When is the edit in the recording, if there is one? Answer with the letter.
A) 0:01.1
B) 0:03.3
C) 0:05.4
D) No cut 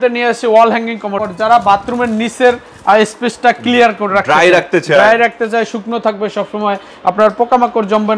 A